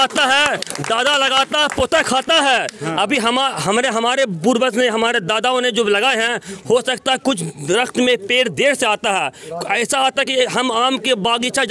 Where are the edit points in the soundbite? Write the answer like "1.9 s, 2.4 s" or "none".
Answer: none